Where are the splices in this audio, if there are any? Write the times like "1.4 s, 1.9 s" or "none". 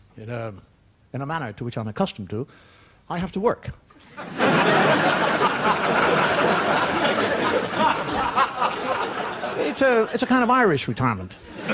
7.3 s